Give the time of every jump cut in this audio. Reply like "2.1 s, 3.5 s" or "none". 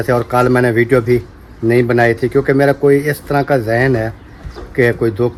none